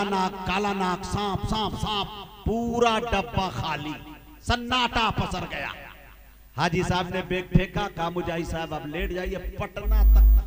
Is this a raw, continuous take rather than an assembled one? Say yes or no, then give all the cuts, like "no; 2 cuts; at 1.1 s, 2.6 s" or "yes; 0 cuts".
yes; 0 cuts